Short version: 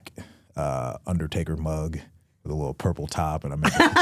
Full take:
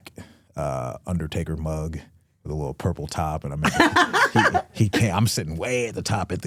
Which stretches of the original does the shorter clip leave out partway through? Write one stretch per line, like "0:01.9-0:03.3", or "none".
none